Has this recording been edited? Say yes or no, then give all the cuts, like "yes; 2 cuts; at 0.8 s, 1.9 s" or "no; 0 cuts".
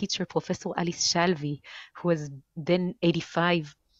no; 0 cuts